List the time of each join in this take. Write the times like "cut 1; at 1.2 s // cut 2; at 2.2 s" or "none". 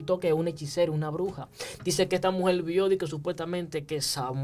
none

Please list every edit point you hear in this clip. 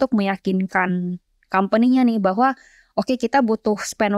none

